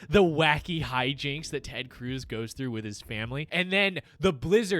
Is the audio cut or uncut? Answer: cut